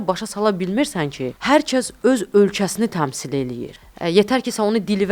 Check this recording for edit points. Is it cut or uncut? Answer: cut